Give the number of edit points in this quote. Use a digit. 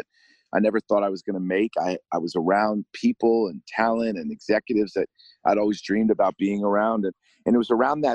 1